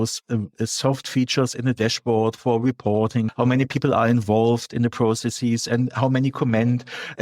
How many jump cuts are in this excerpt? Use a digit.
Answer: 1